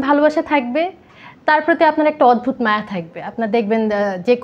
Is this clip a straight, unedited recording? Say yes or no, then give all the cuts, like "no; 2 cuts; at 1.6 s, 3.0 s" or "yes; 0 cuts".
yes; 0 cuts